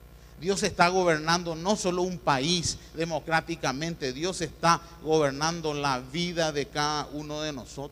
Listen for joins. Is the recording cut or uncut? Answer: cut